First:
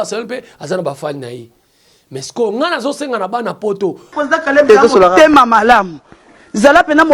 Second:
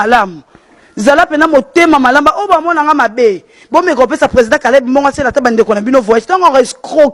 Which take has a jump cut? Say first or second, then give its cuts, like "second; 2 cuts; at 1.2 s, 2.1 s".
first; 1 cut; at 4.1 s